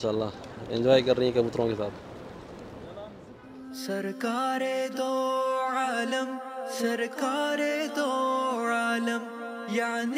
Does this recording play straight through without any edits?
yes; 0 cuts

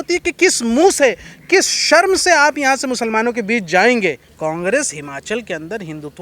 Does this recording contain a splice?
yes; 1 cut; at 4.3 s

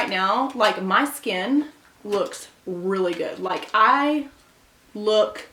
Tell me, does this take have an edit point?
no; 0 cuts

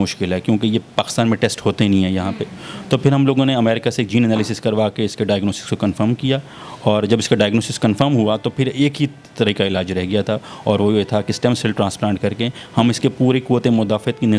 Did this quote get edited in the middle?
no; 0 cuts

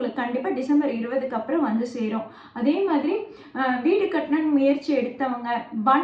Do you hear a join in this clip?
no; 0 cuts

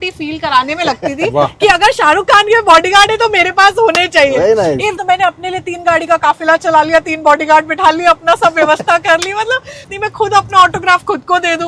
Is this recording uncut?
no; 2 cuts; at 5.0 s, 9.9 s

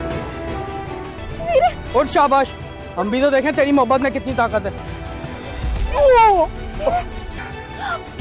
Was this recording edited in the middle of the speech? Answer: yes; 1 cut; at 1.1 s

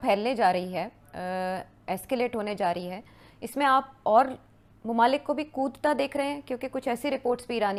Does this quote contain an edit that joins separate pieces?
no; 0 cuts

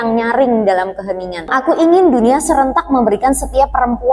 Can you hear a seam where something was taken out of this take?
yes; 1 cut; at 1.5 s

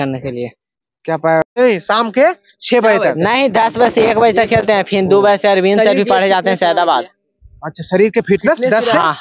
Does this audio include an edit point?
yes; 1 cut; at 1.5 s

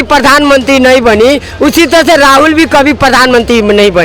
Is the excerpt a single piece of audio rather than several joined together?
yes; 0 cuts

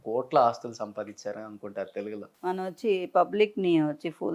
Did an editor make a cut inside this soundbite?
yes; 1 cut; at 2.2 s

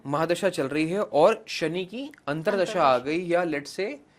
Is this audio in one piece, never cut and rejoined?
yes; 0 cuts

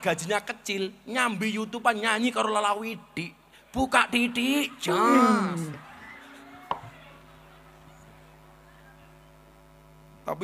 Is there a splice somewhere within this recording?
no; 0 cuts

